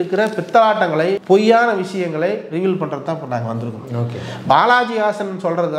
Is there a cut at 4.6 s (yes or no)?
no